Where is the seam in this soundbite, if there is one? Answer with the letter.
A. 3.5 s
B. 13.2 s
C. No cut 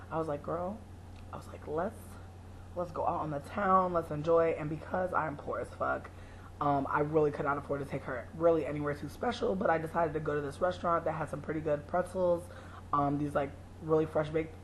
A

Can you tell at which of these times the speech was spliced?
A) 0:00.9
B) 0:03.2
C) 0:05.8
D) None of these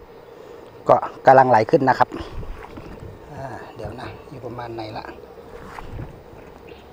D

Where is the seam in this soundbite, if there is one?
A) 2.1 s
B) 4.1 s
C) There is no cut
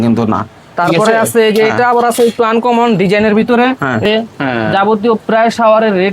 B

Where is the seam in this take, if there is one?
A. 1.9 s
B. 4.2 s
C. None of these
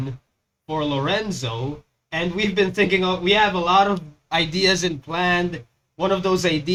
C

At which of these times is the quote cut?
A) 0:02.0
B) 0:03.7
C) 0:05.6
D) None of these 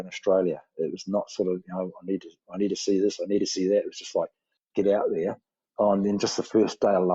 D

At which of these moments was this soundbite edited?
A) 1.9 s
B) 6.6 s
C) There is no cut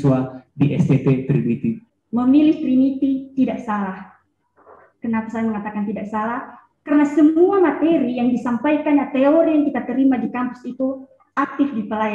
A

